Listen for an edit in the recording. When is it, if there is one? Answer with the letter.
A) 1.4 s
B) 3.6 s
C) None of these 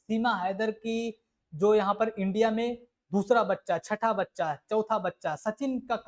C